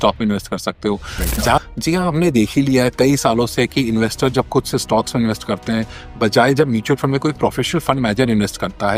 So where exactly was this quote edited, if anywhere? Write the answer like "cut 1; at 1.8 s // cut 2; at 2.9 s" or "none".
cut 1; at 1.6 s

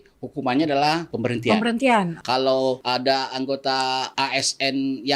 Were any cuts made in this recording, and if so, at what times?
cut 1; at 1.1 s // cut 2; at 2.4 s // cut 3; at 4.1 s

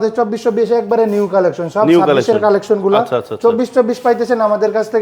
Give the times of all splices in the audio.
none

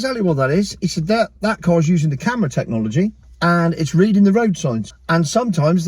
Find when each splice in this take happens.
cut 1; at 3.3 s // cut 2; at 4.9 s

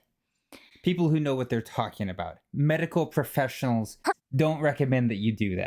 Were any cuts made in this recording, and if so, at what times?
cut 1; at 4.0 s

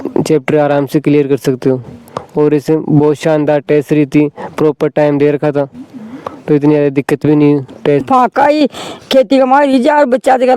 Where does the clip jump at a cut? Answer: cut 1; at 8.1 s

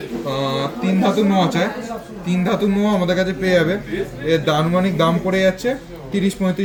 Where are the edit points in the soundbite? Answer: none

